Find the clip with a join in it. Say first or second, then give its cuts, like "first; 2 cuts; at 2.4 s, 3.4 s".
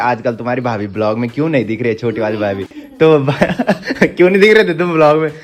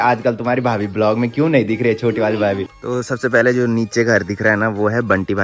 second; 1 cut; at 2.7 s